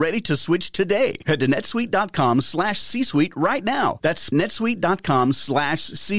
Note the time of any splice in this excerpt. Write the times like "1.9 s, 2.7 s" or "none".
4.3 s